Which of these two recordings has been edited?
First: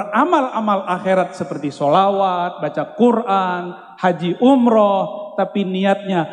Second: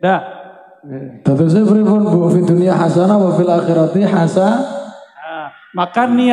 second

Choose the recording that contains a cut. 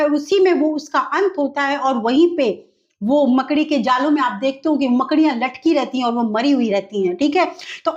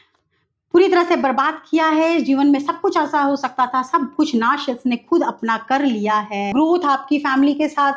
second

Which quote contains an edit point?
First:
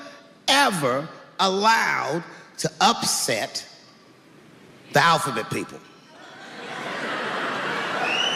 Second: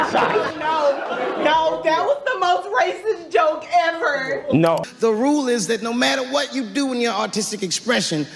second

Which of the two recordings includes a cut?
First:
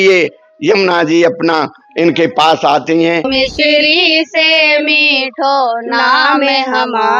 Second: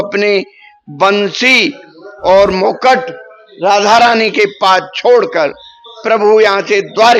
first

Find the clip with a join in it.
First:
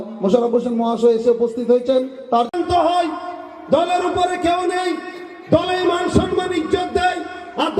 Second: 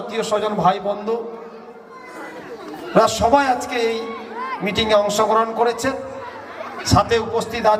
first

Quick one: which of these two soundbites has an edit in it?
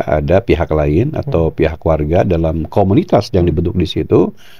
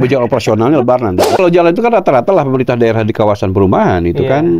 second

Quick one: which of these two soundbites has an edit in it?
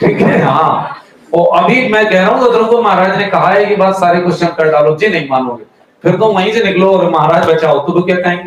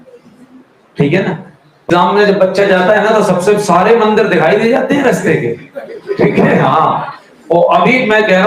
second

